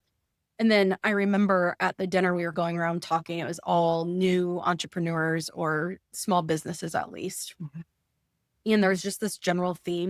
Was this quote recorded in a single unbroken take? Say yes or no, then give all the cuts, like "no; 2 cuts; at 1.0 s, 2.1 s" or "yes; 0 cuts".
no; 1 cut; at 6.1 s